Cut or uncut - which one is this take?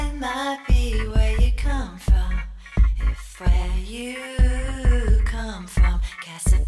cut